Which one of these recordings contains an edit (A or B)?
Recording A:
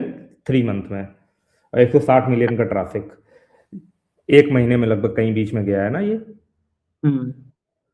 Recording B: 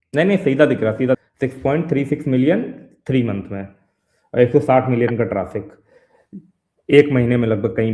B